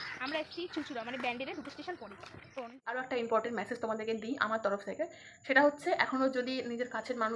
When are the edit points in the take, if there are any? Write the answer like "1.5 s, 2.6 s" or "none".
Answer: 2.5 s